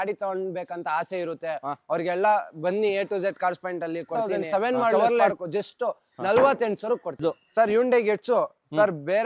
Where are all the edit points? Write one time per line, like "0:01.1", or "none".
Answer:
0:04.1
0:07.2